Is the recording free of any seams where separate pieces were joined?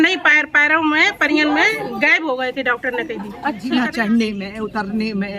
no; 1 cut; at 3.6 s

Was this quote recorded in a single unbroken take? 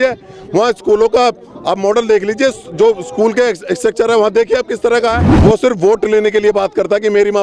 no; 1 cut; at 5.3 s

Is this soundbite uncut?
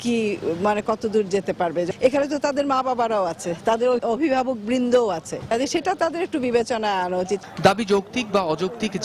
yes; 0 cuts

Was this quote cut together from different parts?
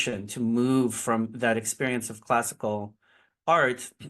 no; 0 cuts

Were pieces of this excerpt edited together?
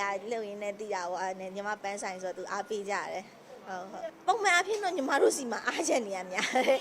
yes; 1 cut; at 4.1 s

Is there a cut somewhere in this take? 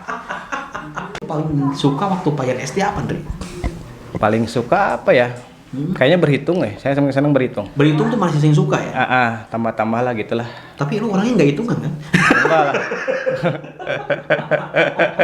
yes; 1 cut; at 1.3 s

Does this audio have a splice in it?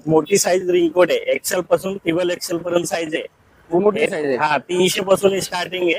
no; 0 cuts

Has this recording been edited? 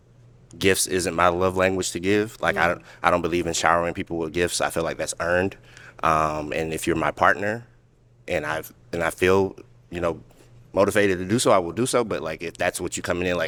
no; 0 cuts

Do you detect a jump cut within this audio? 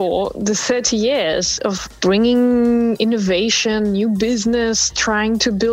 no; 0 cuts

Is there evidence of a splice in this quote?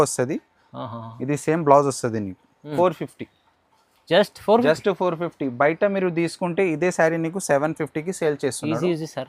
yes; 1 cut; at 2.6 s

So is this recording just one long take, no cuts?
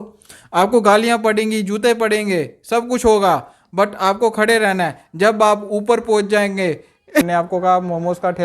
no; 1 cut; at 7.2 s

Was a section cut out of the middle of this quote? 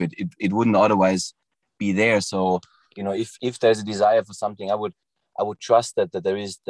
no; 0 cuts

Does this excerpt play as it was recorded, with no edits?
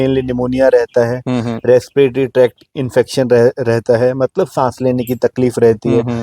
yes; 0 cuts

